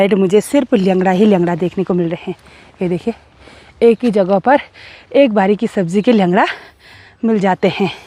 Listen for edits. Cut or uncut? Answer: uncut